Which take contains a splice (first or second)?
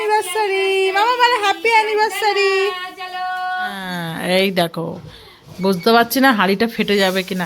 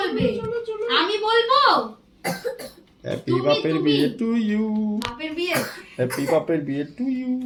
first